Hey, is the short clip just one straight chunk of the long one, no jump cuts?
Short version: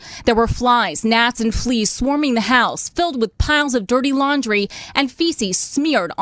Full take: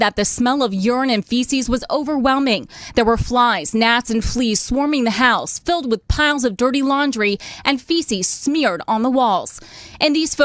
yes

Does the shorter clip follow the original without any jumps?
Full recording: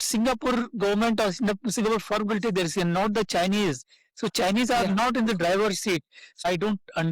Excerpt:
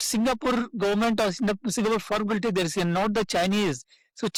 yes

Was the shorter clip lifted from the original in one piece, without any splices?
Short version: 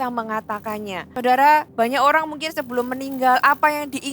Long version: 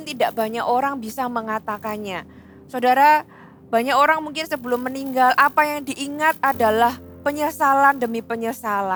no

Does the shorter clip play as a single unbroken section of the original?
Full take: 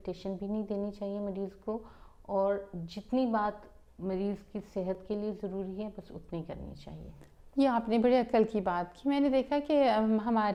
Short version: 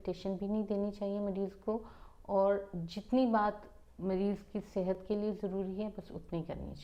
yes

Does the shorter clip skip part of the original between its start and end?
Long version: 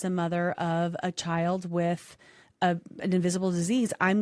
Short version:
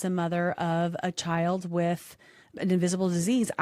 yes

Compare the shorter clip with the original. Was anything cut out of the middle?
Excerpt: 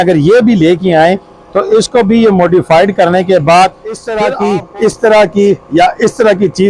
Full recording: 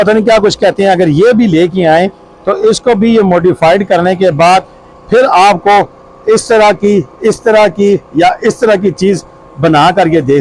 yes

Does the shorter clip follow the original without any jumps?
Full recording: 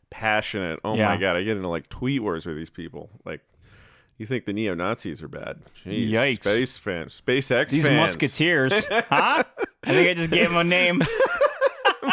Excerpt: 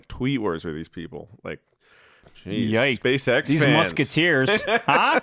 no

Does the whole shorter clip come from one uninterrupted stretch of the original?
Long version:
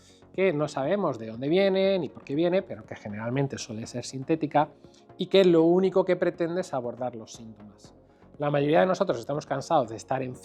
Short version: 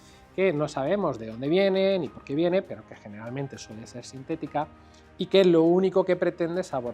yes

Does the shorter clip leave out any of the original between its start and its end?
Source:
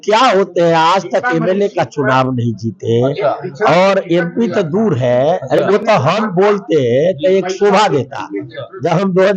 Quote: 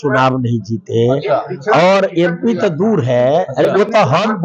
no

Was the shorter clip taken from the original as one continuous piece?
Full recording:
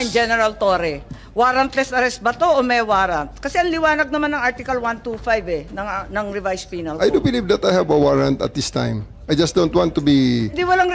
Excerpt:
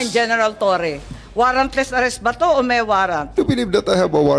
no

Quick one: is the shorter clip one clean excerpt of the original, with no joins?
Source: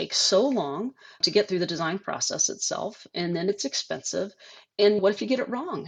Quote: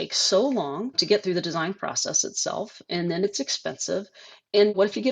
no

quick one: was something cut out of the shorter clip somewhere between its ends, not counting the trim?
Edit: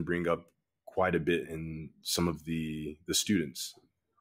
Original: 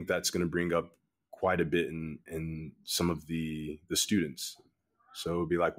yes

